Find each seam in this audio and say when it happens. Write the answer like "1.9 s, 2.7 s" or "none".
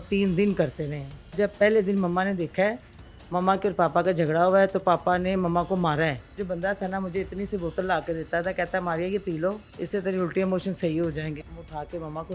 1.3 s, 6.4 s, 11.5 s